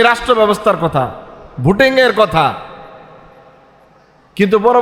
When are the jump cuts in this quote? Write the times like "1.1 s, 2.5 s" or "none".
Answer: none